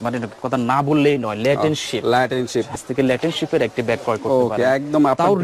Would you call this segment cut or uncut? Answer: cut